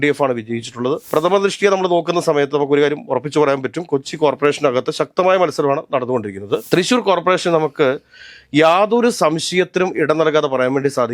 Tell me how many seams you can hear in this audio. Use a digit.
2